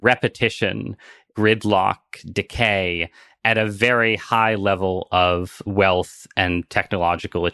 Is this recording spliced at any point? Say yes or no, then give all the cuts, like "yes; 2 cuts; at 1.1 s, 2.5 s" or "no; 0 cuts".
no; 0 cuts